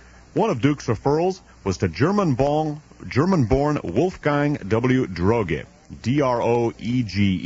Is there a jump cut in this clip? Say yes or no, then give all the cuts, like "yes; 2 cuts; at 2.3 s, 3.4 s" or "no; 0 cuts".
yes; 1 cut; at 3.5 s